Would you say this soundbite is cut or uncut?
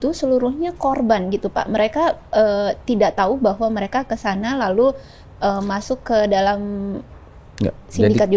uncut